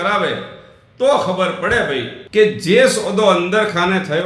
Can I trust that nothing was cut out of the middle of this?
no; 1 cut; at 2.1 s

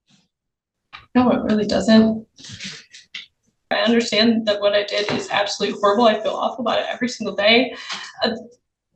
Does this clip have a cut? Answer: yes; 1 cut; at 3.7 s

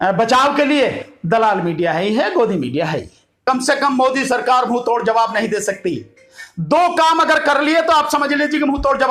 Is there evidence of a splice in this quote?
yes; 1 cut; at 3.5 s

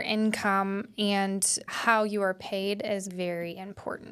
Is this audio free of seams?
no; 2 cuts; at 1.7 s, 3.1 s

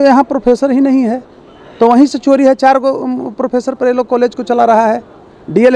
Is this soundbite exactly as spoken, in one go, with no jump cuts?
yes; 0 cuts

